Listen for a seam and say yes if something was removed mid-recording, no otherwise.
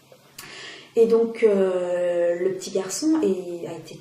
no